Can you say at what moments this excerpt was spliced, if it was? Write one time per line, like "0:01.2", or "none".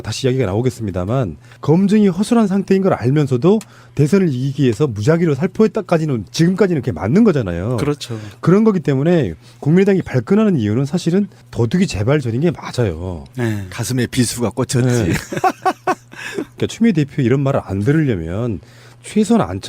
0:05.8

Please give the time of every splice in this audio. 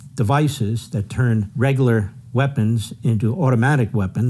0:01.5

